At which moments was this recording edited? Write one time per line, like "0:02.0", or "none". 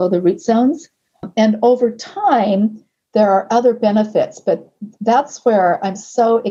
0:01.3